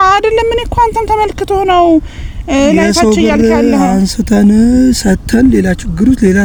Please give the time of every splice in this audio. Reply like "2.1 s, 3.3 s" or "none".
none